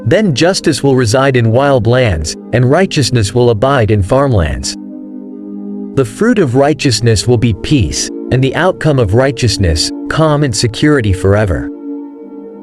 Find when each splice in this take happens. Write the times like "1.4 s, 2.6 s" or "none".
4.5 s, 6.0 s, 11.6 s